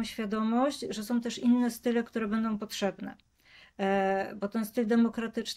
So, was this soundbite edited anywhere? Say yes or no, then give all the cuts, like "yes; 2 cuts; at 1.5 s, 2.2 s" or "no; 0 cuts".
no; 0 cuts